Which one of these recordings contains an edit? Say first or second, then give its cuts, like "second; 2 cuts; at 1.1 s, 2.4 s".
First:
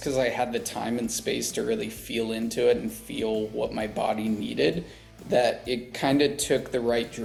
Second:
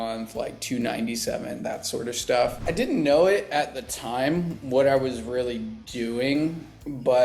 second; 1 cut; at 2.6 s